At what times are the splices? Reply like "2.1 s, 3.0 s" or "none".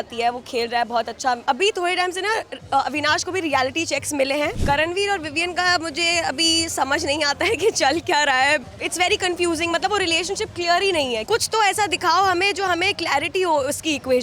1.4 s, 4.6 s, 8.7 s, 11.2 s